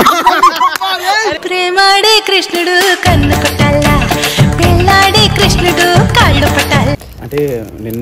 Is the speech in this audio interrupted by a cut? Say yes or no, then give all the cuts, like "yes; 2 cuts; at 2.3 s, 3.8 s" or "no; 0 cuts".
yes; 1 cut; at 7.1 s